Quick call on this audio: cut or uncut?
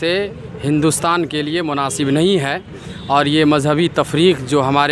uncut